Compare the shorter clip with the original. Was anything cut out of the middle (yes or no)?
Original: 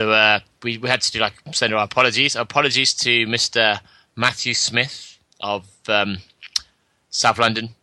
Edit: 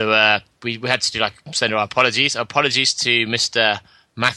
no